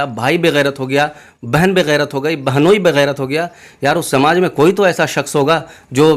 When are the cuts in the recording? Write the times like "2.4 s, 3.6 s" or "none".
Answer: none